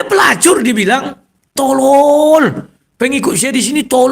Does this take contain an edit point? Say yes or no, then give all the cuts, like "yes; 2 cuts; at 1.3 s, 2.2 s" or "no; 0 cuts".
yes; 1 cut; at 1.5 s